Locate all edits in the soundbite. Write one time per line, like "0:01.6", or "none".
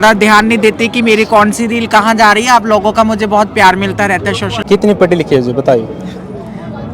0:04.6